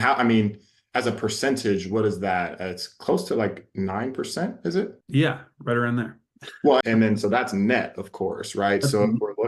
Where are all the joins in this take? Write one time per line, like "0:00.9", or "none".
0:05.0
0:06.8

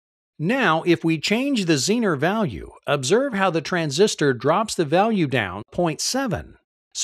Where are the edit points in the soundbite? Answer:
0:01.2

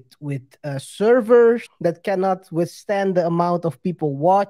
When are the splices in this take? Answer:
0:01.7

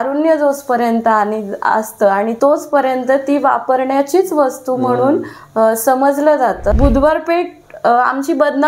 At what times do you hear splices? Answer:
0:02.3
0:06.7

